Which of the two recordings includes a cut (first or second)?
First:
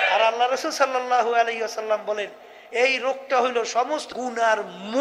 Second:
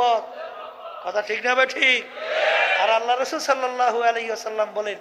first